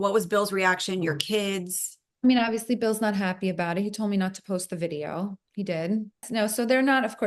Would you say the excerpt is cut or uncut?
cut